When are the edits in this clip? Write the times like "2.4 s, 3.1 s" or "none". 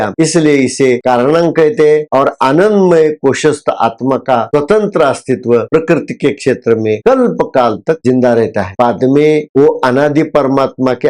none